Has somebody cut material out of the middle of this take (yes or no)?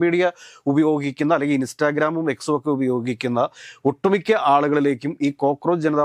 no